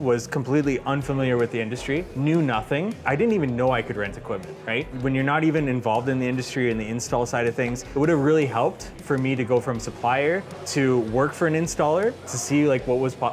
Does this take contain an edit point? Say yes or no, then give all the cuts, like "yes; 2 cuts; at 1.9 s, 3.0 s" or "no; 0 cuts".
yes; 5 cuts; at 2.1 s, 3.0 s, 4.9 s, 7.8 s, 10.6 s